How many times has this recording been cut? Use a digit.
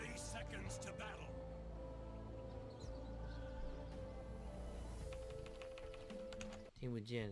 1